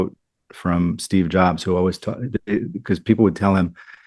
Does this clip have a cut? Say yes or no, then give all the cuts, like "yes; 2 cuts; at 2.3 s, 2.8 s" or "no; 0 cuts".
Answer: no; 0 cuts